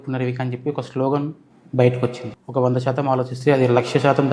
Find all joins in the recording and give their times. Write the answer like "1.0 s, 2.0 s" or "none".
2.3 s